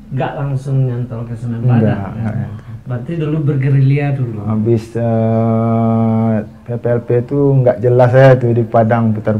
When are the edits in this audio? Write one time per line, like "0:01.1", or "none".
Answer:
none